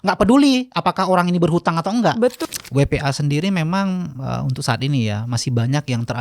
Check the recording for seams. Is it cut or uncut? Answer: cut